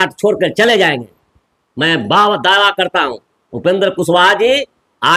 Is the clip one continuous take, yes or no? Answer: yes